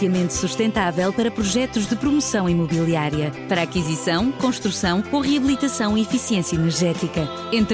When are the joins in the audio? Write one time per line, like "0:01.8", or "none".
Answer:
none